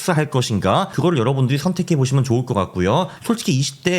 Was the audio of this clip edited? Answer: yes; 2 cuts; at 0.9 s, 3.1 s

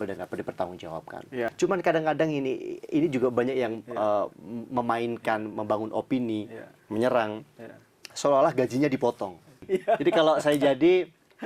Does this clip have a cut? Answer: yes; 2 cuts; at 1.5 s, 9.6 s

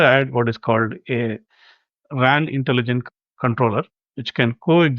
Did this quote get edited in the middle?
yes; 1 cut; at 4.0 s

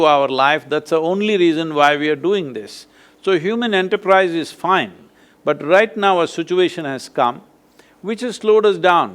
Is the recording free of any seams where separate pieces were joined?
yes; 0 cuts

